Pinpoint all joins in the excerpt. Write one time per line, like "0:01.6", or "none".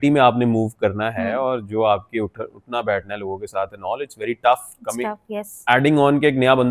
none